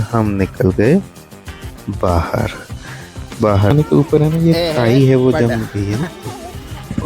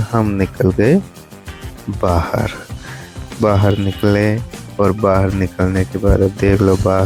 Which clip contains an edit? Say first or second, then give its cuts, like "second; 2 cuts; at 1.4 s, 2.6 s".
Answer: first; 1 cut; at 3.7 s